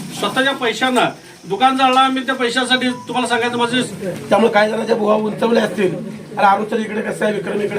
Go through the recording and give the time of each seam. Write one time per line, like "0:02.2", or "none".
0:03.9